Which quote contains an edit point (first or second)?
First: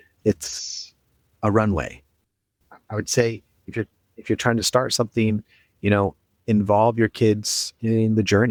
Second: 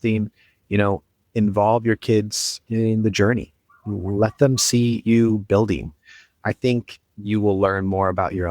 second